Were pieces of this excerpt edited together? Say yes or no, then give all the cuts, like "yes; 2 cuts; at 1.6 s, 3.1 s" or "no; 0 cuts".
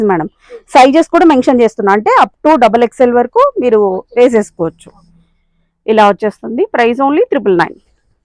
no; 0 cuts